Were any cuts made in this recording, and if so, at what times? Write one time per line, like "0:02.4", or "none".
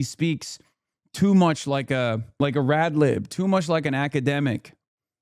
0:02.2